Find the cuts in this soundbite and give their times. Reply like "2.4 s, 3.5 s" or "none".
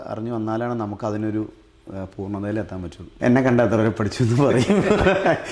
3.1 s